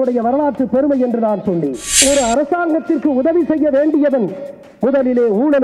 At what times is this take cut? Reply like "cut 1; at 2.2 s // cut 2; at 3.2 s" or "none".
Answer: cut 1; at 2.0 s